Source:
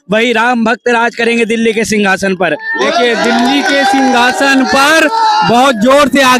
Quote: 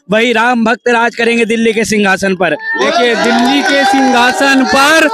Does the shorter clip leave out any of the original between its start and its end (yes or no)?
no